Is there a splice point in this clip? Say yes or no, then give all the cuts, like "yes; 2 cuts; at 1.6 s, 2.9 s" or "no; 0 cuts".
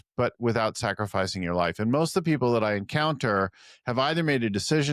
no; 0 cuts